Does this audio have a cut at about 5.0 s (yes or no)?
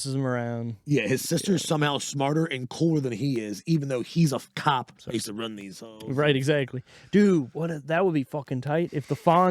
yes